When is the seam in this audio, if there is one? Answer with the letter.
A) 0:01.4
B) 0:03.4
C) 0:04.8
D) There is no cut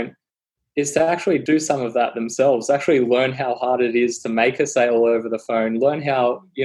A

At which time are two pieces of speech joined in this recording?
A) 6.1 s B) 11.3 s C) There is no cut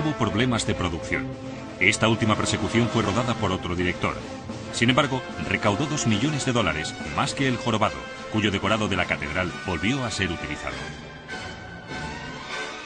B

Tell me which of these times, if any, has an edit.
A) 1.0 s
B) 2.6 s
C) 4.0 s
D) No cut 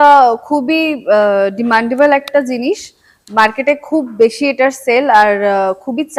D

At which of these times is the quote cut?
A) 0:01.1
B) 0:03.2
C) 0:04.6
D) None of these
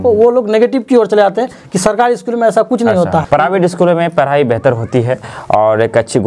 B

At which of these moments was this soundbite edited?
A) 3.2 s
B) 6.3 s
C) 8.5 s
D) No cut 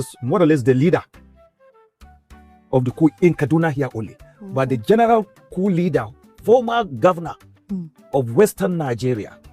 B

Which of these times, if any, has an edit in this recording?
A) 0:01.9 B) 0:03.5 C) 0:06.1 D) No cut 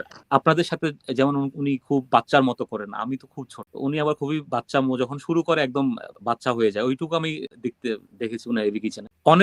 D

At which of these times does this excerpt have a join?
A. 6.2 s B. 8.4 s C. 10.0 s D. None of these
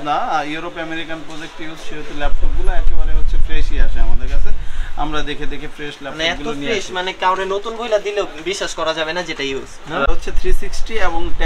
C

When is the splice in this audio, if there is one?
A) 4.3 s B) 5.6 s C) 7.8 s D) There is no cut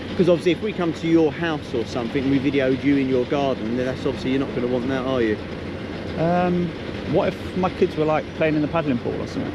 D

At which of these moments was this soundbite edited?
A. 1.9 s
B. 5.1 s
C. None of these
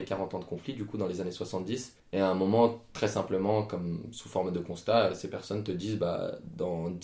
A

